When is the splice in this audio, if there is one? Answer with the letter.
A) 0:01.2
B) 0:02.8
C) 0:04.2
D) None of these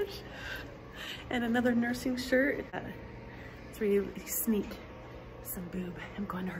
B